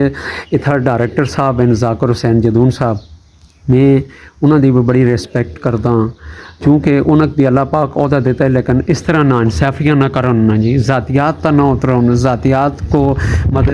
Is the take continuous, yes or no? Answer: yes